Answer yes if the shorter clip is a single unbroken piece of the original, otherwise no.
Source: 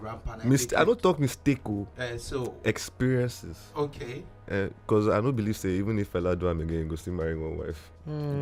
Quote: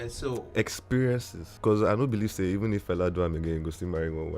no